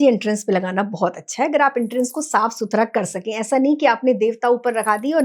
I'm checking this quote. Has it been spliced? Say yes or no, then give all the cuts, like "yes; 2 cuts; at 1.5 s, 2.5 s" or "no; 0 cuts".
no; 0 cuts